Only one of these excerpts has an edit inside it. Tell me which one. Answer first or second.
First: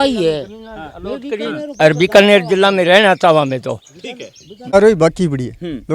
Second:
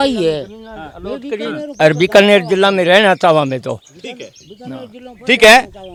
first